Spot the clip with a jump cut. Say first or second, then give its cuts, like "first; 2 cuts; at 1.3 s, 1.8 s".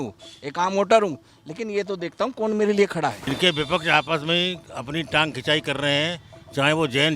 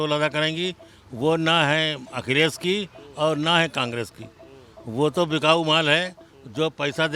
first; 1 cut; at 3.2 s